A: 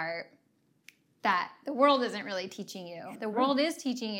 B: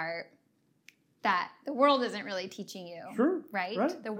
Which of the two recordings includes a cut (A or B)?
A